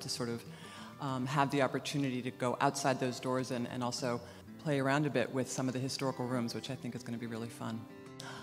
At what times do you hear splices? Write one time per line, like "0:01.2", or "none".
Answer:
0:01.7